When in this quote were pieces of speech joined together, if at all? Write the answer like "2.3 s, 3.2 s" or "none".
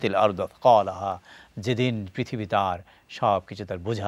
none